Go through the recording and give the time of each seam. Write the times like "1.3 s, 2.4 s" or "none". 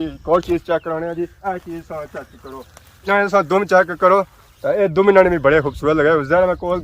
1.4 s, 3.0 s